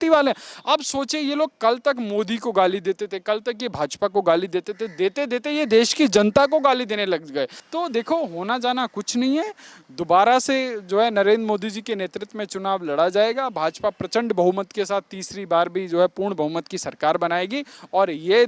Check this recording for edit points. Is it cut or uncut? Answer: cut